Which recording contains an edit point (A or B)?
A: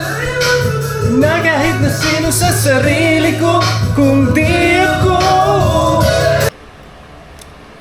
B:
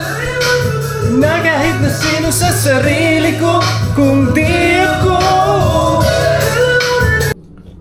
A